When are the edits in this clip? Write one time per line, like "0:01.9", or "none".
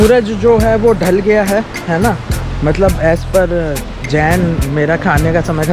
none